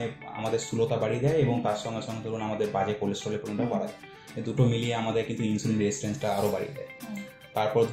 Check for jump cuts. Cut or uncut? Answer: uncut